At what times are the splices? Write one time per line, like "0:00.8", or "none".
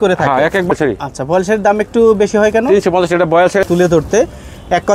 0:00.7
0:03.6